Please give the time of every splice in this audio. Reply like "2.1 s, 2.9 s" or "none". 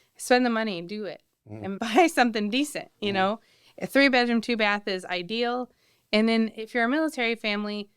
1.8 s